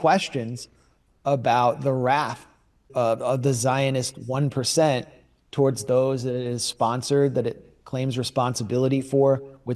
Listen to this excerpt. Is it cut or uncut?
cut